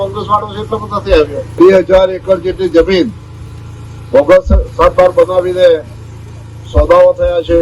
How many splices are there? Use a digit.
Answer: 1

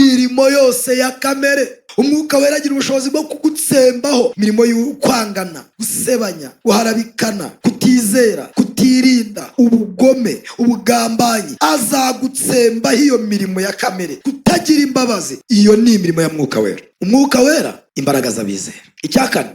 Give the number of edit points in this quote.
8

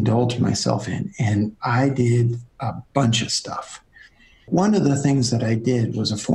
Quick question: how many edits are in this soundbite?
1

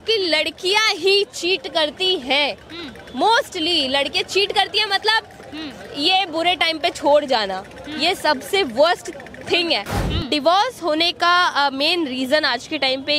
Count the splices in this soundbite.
1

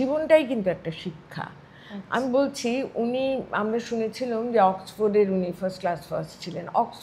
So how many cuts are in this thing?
0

